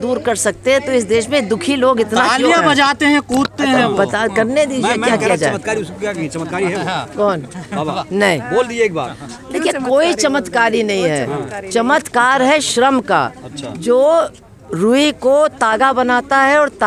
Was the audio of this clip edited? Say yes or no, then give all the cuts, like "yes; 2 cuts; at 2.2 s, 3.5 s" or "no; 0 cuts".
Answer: no; 0 cuts